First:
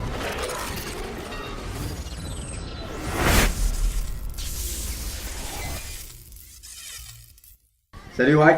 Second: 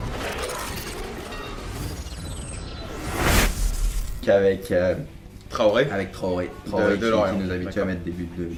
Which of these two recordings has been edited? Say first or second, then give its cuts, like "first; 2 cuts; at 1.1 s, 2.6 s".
first; 1 cut; at 4.2 s